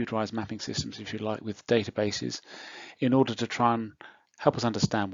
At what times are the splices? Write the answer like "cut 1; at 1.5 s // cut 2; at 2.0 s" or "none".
none